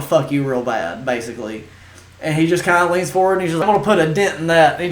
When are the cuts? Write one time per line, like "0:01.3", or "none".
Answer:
0:03.6